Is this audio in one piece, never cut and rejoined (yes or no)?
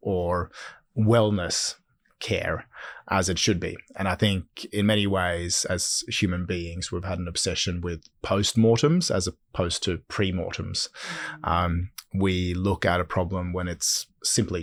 yes